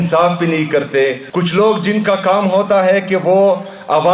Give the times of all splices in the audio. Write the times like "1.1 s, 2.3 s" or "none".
1.2 s